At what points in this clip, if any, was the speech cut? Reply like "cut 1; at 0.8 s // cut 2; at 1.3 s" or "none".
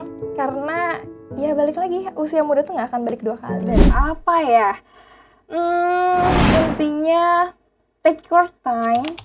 cut 1; at 3.9 s

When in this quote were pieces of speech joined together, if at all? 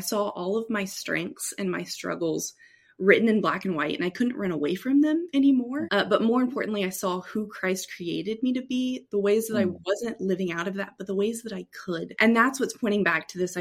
cut 1; at 5.8 s // cut 2; at 12.1 s

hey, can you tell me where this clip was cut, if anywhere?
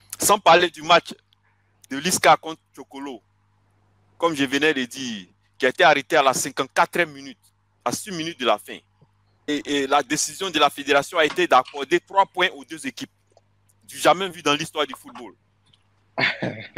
none

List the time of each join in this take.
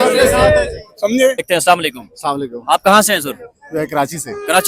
cut 1; at 1.5 s

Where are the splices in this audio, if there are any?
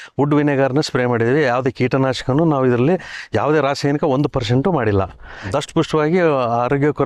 cut 1; at 5.5 s

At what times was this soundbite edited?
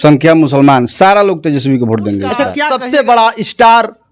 cut 1; at 2.6 s

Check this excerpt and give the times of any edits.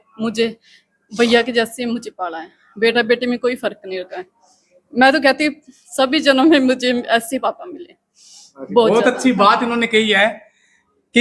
none

